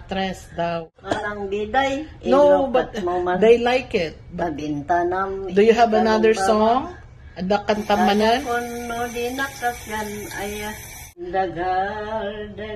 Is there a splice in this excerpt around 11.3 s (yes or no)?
yes